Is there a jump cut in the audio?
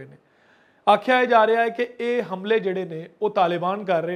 no; 0 cuts

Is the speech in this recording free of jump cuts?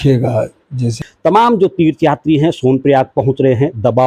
no; 1 cut; at 0.9 s

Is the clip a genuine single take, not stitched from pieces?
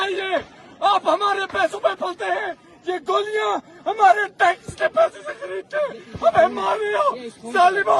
yes; 0 cuts

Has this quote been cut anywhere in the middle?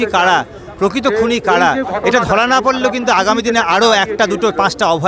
no; 0 cuts

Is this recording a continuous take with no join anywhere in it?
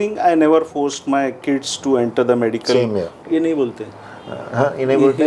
no; 1 cut; at 3.2 s

